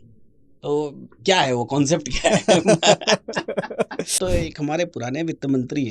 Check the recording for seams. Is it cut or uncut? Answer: cut